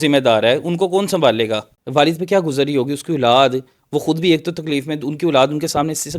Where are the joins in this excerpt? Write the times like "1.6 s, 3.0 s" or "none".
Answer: 1.7 s

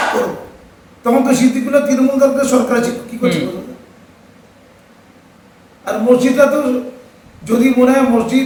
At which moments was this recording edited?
none

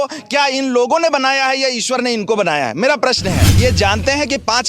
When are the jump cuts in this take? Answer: 3.5 s

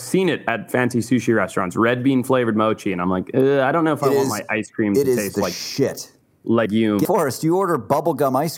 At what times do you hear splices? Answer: 7.0 s

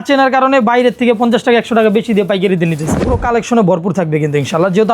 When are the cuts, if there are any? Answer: 3.0 s

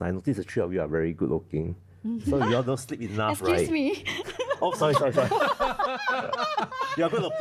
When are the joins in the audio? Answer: none

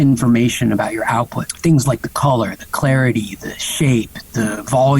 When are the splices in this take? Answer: 1.4 s

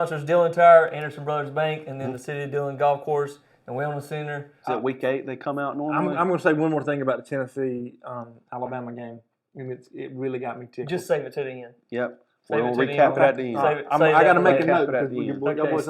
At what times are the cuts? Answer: 4.5 s

